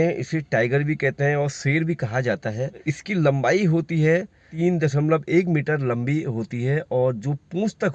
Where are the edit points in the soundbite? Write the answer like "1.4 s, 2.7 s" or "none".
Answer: 2.9 s, 4.5 s